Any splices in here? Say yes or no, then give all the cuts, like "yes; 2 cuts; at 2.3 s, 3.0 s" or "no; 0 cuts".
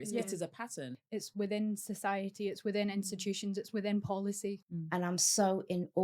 yes; 2 cuts; at 0.9 s, 4.7 s